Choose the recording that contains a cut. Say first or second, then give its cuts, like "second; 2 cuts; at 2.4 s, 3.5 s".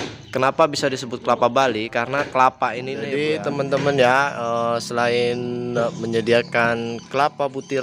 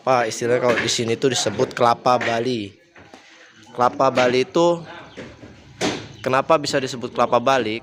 first; 1 cut; at 2.9 s